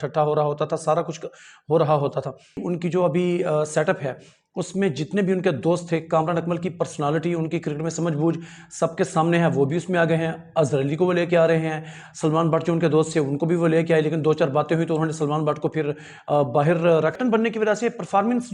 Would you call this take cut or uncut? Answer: cut